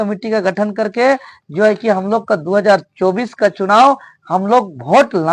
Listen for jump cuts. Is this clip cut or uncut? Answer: uncut